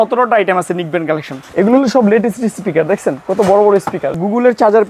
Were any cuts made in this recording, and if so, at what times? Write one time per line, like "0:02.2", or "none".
0:01.4
0:04.1